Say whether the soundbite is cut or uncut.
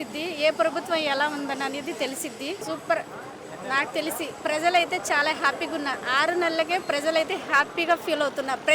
cut